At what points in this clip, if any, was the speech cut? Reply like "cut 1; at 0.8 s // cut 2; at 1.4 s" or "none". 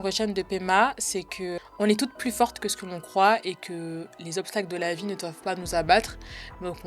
cut 1; at 1.5 s

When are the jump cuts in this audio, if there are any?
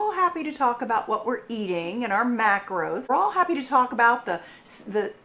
cut 1; at 3.1 s

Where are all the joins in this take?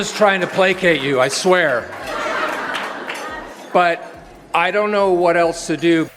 none

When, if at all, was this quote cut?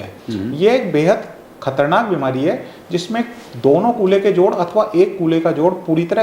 none

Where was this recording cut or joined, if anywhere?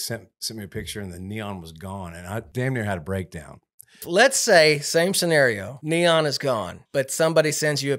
cut 1; at 2.5 s // cut 2; at 4.0 s // cut 3; at 5.7 s // cut 4; at 6.8 s

